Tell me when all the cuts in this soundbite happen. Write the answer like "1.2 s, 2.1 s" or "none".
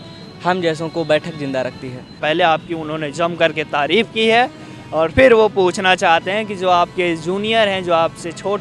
2.1 s